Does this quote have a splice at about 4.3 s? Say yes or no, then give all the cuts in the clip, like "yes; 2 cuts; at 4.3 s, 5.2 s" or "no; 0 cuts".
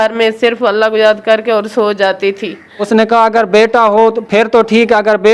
no; 1 cut; at 2.9 s